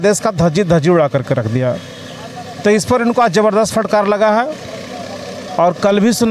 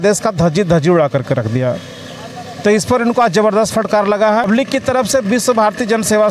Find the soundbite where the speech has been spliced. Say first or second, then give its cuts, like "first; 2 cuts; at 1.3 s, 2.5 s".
second; 1 cut; at 4.5 s